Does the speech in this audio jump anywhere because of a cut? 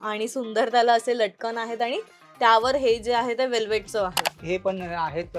yes; 1 cut; at 4.3 s

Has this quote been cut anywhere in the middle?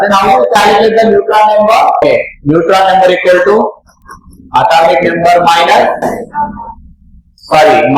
yes; 1 cut; at 2.0 s

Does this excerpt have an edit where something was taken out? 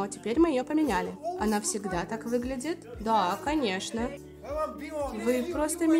yes; 2 cuts; at 4.1 s, 5.1 s

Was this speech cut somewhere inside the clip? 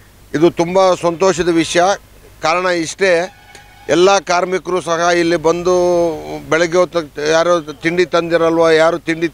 no; 0 cuts

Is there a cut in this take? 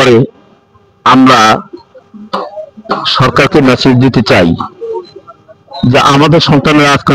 no; 0 cuts

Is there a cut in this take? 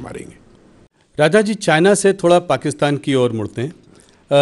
yes; 1 cut; at 1.0 s

